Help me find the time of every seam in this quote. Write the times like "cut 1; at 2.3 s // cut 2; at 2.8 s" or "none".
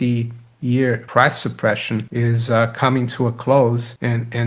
cut 1; at 1.0 s